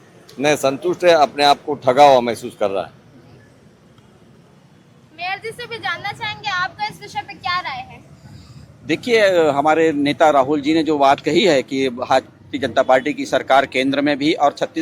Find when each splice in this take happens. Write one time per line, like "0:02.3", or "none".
none